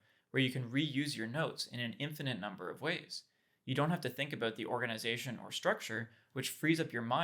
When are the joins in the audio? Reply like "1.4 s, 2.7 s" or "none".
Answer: none